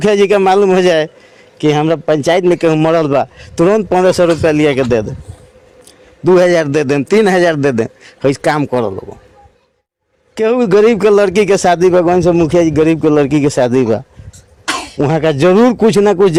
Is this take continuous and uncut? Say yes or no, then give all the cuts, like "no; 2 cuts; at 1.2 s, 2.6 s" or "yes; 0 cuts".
yes; 0 cuts